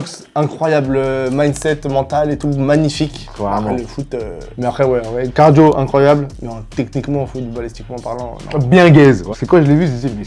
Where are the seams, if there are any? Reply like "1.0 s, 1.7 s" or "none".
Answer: 4.4 s, 9.3 s